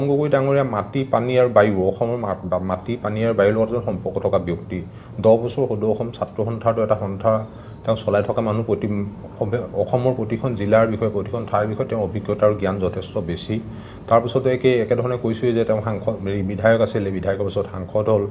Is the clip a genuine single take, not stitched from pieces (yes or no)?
yes